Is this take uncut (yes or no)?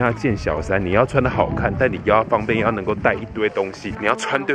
yes